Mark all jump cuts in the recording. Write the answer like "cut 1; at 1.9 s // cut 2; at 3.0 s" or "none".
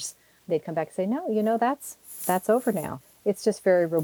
cut 1; at 3.0 s